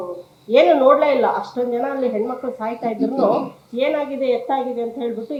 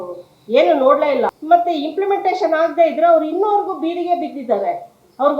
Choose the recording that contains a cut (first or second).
second